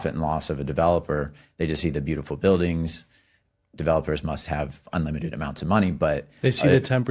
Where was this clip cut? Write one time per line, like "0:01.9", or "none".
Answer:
none